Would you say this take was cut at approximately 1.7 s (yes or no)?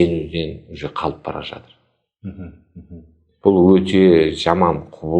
no